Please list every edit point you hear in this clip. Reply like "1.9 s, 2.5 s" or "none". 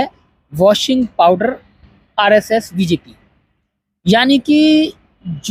none